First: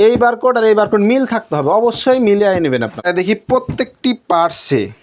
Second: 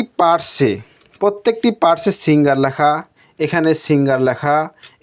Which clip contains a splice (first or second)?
first